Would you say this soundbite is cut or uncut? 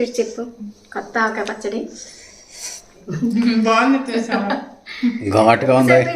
cut